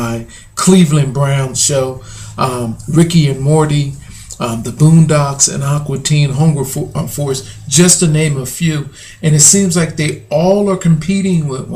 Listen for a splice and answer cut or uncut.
cut